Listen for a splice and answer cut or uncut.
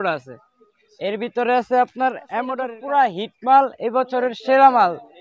cut